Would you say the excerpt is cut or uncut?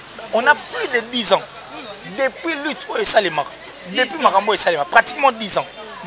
uncut